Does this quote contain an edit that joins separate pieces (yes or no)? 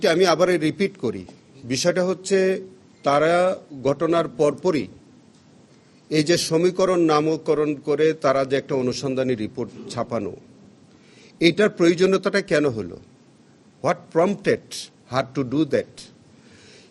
no